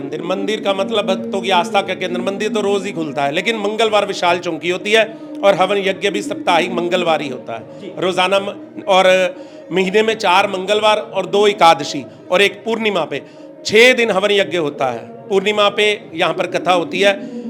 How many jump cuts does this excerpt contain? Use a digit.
0